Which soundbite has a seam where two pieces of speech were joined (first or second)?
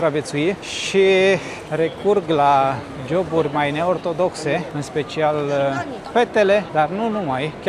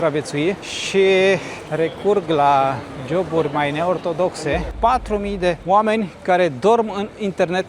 second